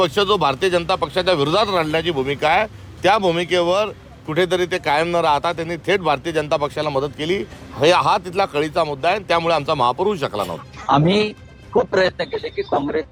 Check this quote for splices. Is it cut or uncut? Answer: uncut